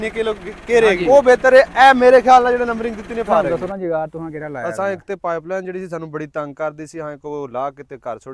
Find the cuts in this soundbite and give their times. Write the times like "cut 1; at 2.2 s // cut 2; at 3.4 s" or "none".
cut 1; at 1.0 s // cut 2; at 3.5 s